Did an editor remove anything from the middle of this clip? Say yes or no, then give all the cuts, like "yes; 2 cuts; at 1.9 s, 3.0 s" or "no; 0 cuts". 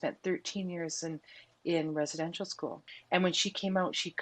yes; 1 cut; at 2.9 s